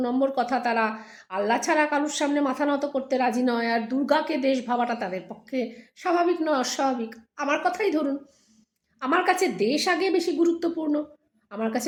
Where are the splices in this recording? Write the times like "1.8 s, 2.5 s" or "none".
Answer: none

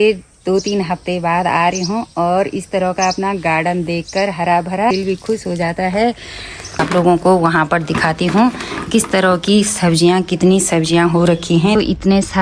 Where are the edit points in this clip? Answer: 4.9 s, 6.8 s, 11.8 s

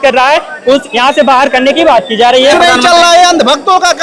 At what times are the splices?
0.9 s, 2.5 s

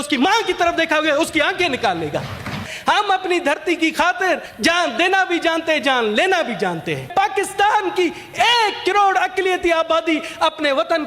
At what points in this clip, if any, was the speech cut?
2.7 s, 4.5 s, 7.1 s

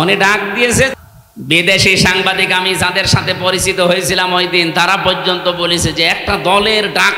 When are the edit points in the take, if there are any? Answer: 0.9 s

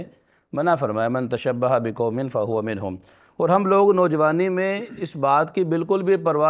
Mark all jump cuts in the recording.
none

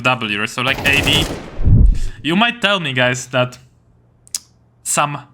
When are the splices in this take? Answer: 1.7 s

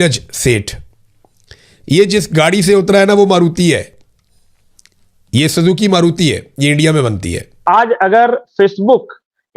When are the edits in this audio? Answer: 7.6 s

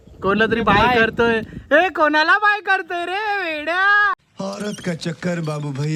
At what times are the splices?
none

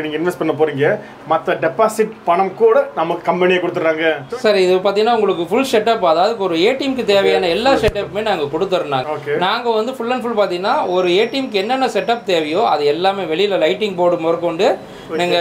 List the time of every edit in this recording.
4.2 s, 9.0 s

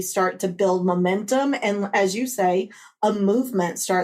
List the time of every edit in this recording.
none

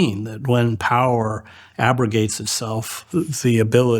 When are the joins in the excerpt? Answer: 3.0 s

